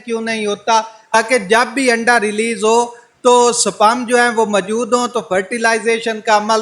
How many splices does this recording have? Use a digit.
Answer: 1